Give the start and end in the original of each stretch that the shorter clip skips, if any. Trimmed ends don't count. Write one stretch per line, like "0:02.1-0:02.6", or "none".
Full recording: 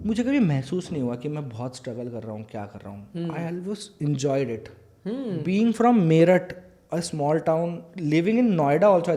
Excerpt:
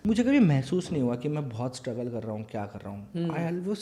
none